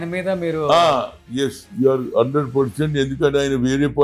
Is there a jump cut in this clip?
no; 0 cuts

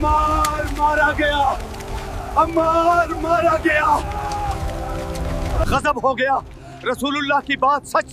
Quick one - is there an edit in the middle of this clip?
no; 0 cuts

